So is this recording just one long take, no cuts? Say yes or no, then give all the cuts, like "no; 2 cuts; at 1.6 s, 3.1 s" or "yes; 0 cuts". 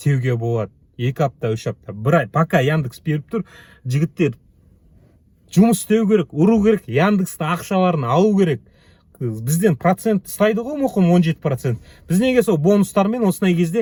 yes; 0 cuts